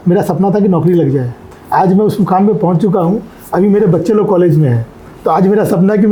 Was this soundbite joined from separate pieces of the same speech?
no; 0 cuts

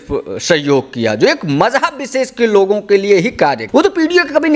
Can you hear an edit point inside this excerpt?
yes; 1 cut; at 3.6 s

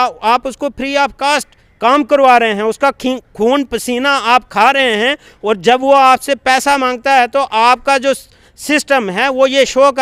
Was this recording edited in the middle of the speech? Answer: no; 0 cuts

